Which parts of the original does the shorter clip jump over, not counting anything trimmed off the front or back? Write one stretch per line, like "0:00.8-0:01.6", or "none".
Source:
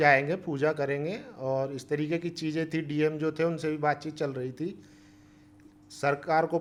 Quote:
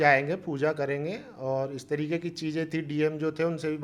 none